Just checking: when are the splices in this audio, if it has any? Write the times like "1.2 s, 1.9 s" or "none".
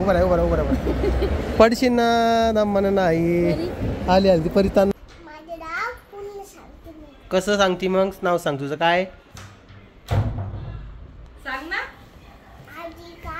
4.9 s